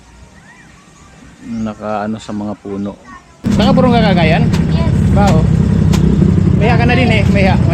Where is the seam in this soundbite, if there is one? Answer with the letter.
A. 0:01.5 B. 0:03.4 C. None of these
B